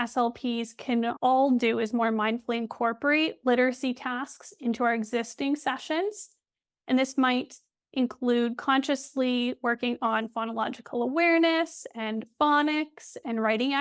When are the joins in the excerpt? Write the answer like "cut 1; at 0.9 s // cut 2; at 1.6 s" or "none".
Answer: cut 1; at 1.2 s